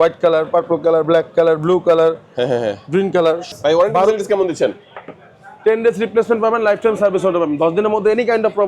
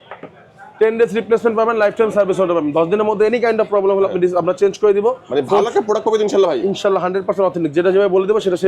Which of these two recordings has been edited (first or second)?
first